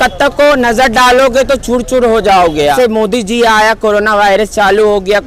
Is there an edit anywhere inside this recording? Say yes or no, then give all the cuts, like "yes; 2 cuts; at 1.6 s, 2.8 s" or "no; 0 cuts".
yes; 1 cut; at 2.7 s